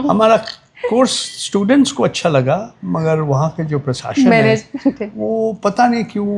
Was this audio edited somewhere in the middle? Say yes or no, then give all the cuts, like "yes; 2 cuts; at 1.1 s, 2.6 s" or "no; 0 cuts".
no; 0 cuts